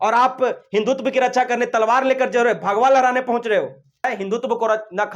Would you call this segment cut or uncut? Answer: cut